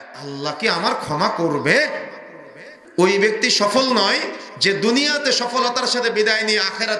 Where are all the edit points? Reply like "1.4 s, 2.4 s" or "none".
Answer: 2.8 s